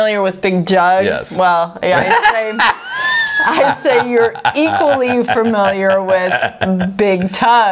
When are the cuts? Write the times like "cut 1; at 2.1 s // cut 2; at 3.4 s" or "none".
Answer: none